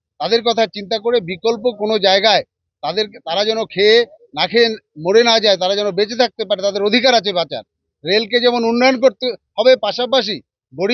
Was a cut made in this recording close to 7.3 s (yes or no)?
no